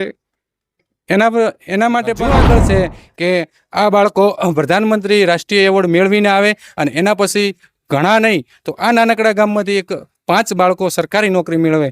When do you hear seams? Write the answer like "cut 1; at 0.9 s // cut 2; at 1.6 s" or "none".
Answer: cut 1; at 2.4 s